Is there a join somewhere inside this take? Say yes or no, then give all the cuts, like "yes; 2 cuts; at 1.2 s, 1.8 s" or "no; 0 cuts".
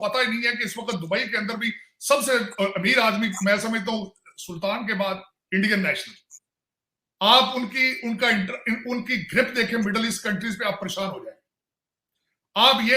no; 0 cuts